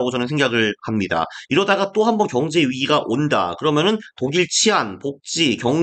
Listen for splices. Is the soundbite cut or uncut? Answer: uncut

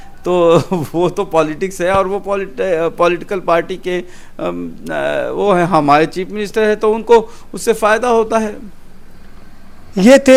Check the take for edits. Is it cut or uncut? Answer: uncut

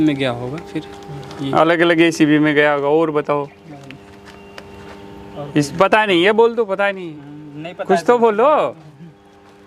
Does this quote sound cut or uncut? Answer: uncut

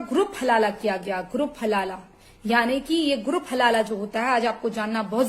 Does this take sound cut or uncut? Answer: uncut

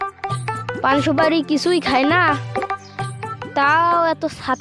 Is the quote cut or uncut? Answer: uncut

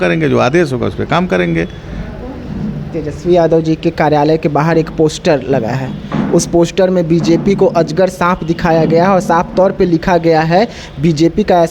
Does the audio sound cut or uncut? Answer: uncut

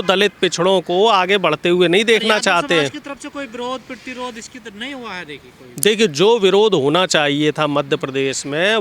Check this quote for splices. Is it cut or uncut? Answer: uncut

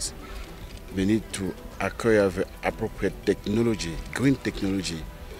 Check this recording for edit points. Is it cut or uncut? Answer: uncut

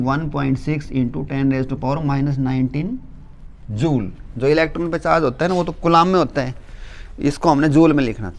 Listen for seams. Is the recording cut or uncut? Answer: uncut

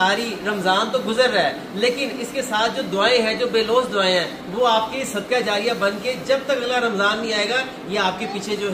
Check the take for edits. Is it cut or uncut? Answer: uncut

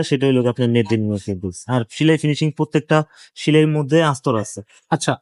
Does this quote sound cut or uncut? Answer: uncut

